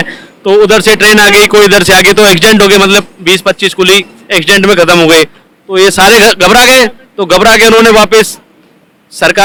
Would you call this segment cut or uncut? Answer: uncut